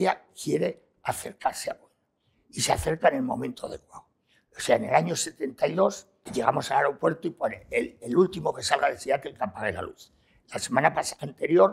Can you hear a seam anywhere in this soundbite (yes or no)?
yes